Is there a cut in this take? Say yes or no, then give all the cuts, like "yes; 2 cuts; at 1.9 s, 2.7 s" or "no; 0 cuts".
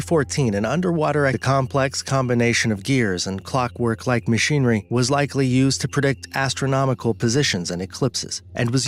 no; 0 cuts